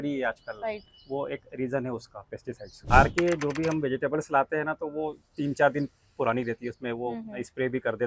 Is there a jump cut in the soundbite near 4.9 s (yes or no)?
no